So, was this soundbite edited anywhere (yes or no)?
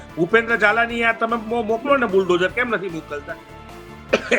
no